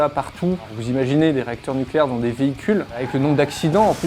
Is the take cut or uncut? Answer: cut